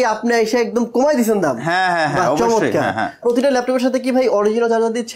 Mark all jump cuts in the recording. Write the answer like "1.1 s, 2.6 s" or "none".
3.2 s